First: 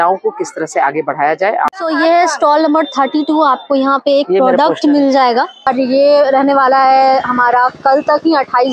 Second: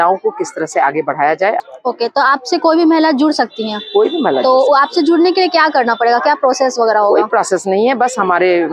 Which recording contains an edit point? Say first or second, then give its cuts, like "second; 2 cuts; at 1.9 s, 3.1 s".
first; 2 cuts; at 1.7 s, 5.7 s